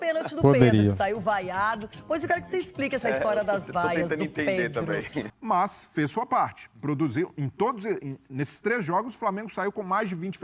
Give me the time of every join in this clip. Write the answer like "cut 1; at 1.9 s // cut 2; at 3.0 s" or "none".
cut 1; at 5.3 s

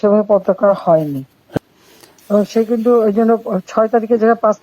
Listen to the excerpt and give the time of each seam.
cut 1; at 1.6 s

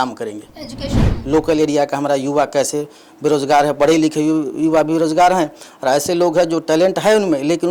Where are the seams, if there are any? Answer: cut 1; at 1.1 s

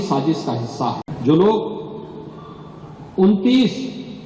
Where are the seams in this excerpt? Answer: cut 1; at 1.1 s

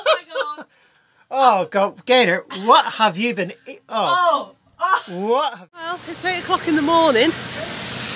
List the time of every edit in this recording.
cut 1; at 5.7 s

